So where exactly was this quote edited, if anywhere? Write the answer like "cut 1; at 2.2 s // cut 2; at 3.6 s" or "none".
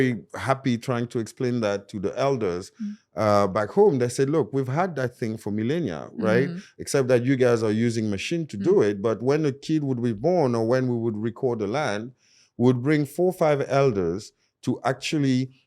none